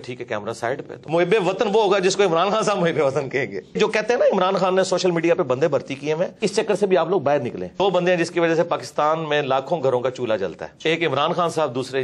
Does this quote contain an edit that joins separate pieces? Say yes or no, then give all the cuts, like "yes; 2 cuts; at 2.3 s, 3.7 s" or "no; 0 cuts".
yes; 5 cuts; at 1.0 s, 3.8 s, 6.4 s, 7.8 s, 10.7 s